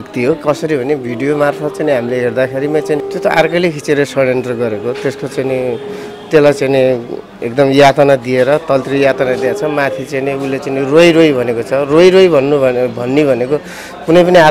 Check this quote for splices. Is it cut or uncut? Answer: cut